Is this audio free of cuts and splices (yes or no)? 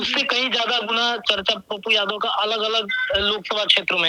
yes